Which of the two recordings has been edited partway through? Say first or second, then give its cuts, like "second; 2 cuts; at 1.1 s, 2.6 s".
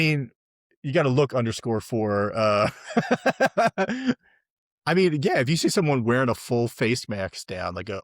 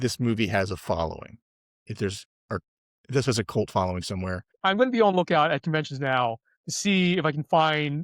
second; 1 cut; at 4.5 s